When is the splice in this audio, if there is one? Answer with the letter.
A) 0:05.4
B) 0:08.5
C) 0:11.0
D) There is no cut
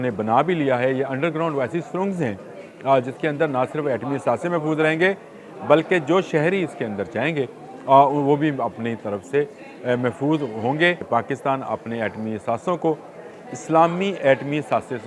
C